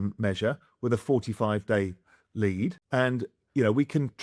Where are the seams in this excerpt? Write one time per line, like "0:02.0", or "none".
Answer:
0:02.8